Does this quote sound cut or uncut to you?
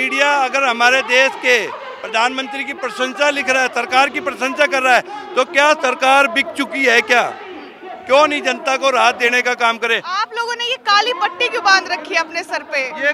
uncut